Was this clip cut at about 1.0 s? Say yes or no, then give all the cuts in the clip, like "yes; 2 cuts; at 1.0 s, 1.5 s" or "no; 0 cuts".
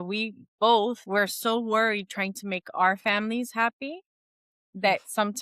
yes; 1 cut; at 1.0 s